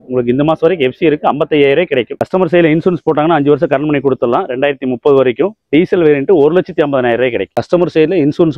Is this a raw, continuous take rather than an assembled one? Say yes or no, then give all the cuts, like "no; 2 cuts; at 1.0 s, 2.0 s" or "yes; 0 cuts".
no; 2 cuts; at 2.2 s, 7.5 s